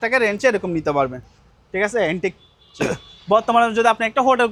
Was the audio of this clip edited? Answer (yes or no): no